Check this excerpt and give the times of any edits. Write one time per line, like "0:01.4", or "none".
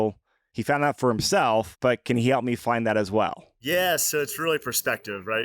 0:01.7
0:03.5